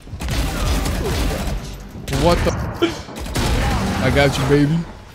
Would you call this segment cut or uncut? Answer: cut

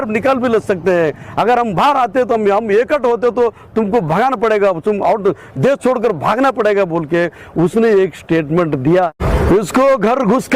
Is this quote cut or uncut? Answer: cut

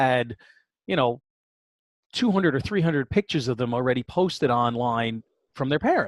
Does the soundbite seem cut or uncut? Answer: uncut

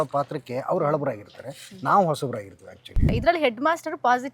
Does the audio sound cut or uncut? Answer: cut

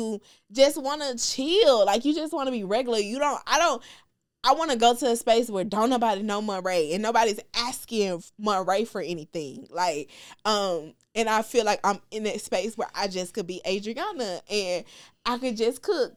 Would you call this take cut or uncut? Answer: uncut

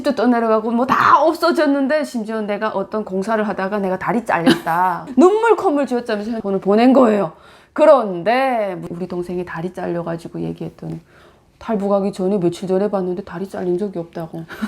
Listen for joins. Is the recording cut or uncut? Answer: cut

